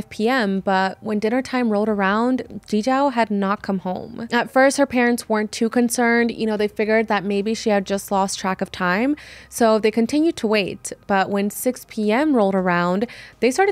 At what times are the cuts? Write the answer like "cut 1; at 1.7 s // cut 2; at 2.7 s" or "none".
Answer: none